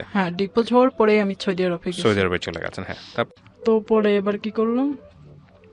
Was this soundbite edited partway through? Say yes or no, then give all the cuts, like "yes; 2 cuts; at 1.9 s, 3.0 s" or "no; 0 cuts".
yes; 1 cut; at 3.3 s